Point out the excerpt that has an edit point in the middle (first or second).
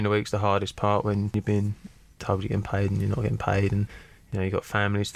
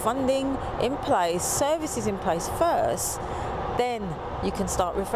first